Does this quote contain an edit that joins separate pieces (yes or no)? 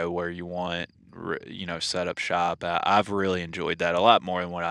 no